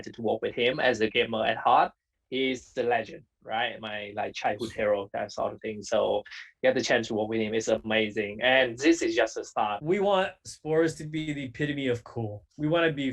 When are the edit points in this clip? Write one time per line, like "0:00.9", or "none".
0:09.8

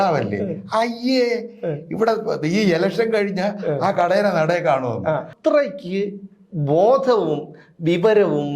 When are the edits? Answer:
0:05.3

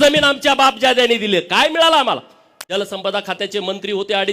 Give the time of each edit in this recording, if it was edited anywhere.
0:02.9

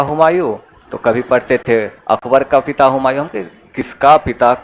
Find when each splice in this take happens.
none

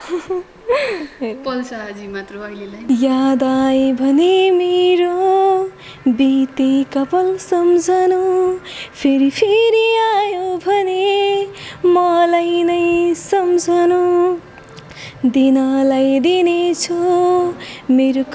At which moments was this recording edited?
0:02.8

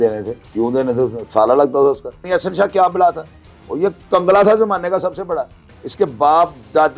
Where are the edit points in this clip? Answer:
0:02.2

